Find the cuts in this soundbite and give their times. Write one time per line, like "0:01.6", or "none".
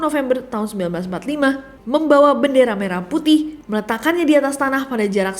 0:01.7